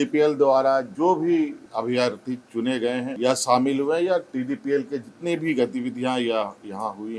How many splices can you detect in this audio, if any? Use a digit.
3